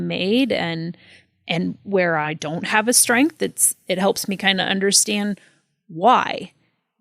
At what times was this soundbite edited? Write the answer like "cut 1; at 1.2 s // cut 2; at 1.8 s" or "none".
cut 1; at 2.3 s